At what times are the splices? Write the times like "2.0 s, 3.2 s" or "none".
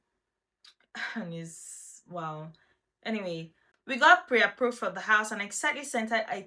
3.5 s